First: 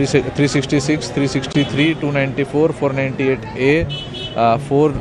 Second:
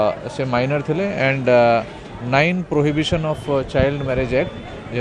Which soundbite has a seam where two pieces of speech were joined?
first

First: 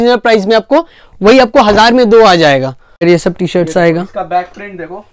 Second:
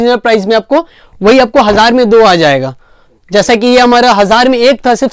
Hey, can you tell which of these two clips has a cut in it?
first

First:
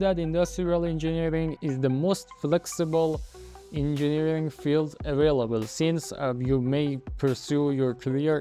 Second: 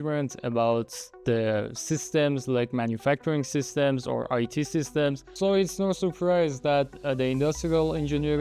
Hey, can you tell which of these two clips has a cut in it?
second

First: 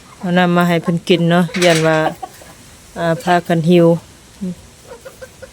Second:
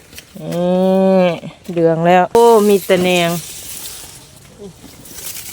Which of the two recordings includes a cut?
second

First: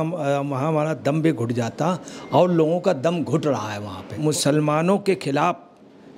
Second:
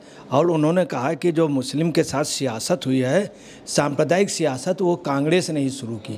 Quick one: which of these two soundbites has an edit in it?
first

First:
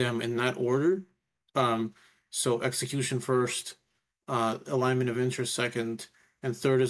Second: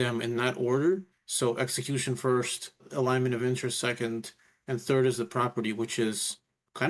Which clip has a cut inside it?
second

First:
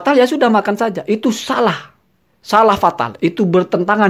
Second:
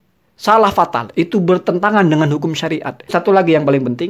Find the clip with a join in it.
second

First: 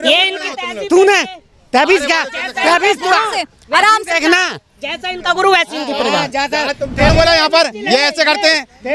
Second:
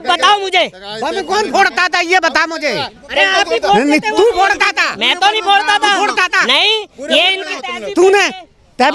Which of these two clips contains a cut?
first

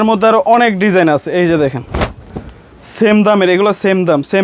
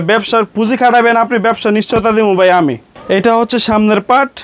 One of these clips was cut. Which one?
second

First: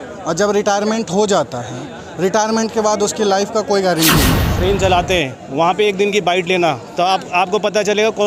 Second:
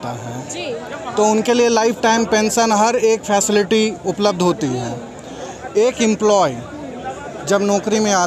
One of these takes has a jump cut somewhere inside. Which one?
first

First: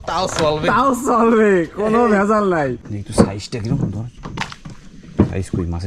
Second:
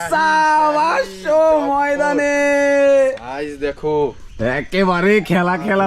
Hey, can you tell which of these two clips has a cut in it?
first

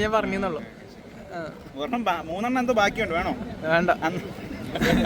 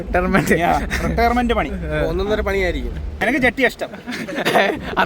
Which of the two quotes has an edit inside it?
second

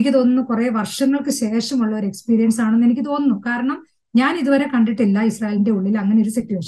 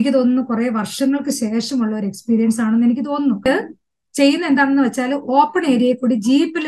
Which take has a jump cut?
second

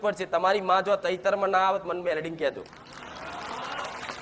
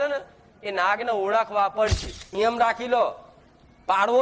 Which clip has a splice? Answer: second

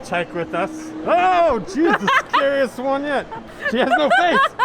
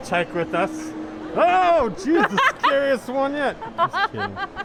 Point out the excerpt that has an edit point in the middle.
first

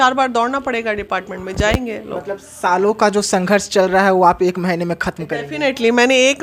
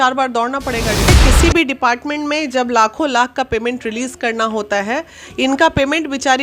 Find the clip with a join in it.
second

